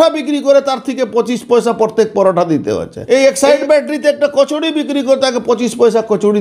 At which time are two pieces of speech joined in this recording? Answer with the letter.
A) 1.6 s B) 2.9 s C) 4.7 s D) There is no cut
B